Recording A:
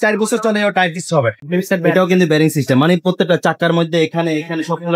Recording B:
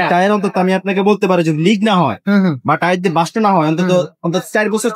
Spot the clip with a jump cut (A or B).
A